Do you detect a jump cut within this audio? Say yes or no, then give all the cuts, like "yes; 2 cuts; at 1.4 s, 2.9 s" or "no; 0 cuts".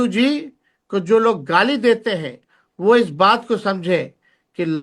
no; 0 cuts